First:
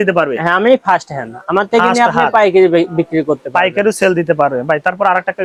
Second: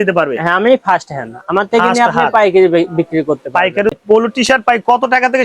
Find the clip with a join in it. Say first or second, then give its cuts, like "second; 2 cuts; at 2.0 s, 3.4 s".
second; 1 cut; at 4.0 s